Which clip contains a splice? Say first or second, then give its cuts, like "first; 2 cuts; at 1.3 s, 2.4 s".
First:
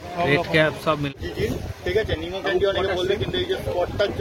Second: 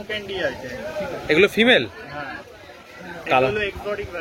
first; 1 cut; at 1.1 s